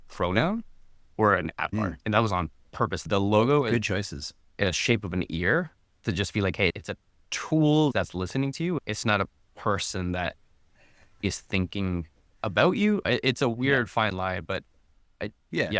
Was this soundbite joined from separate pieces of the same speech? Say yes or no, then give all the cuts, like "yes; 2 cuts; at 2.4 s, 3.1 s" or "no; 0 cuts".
yes; 4 cuts; at 2.0 s, 3.0 s, 8.6 s, 13.0 s